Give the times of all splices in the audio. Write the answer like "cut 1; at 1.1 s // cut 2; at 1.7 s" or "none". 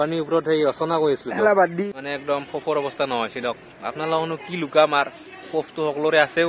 cut 1; at 1.9 s